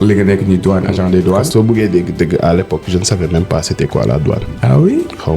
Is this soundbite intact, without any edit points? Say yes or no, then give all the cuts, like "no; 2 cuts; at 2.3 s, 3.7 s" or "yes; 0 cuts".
no; 2 cuts; at 1.5 s, 4.5 s